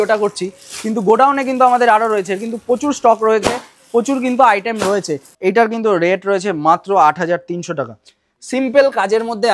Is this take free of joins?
no; 1 cut; at 5.3 s

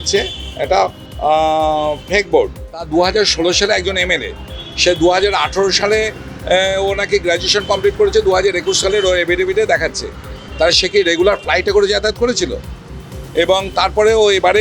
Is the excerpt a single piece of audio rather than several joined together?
no; 1 cut; at 2.9 s

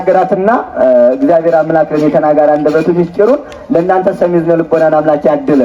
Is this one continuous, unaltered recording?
yes; 0 cuts

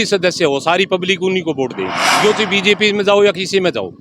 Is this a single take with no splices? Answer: no; 1 cut; at 2.0 s

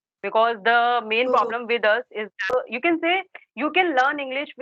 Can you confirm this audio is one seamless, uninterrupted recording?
no; 1 cut; at 2.4 s

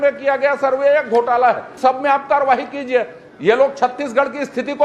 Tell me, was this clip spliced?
yes; 1 cut; at 1.7 s

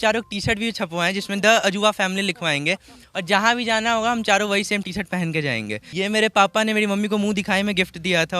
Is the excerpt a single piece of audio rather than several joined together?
no; 1 cut; at 5.8 s

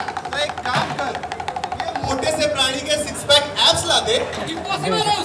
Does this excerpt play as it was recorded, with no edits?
yes; 0 cuts

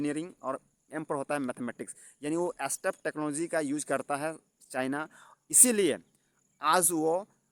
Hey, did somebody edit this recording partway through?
no; 0 cuts

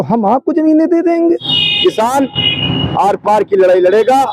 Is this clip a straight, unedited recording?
no; 1 cut; at 1.4 s

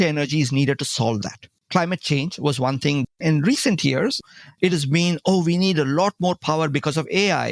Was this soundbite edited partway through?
yes; 3 cuts; at 1.5 s, 3.1 s, 4.2 s

